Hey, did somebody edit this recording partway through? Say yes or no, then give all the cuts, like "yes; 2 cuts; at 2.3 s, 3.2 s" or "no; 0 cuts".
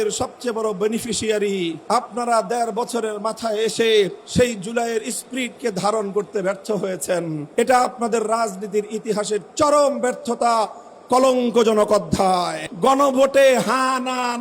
yes; 4 cuts; at 1.8 s, 4.2 s, 7.4 s, 12.6 s